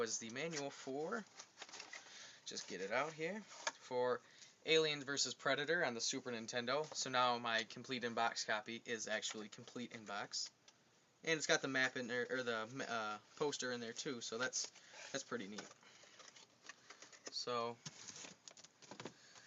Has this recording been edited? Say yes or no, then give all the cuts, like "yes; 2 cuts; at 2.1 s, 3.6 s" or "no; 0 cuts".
no; 0 cuts